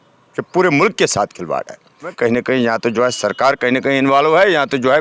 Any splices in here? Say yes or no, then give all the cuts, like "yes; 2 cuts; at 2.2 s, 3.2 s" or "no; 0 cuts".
yes; 1 cut; at 2.1 s